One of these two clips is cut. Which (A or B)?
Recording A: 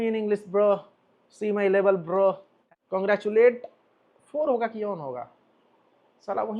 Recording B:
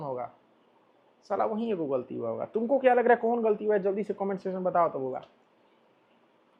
A